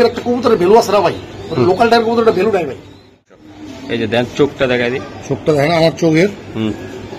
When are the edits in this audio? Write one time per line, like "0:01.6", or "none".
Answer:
0:03.2